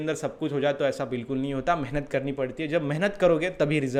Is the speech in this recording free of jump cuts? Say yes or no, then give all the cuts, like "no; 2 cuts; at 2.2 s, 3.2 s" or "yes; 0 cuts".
yes; 0 cuts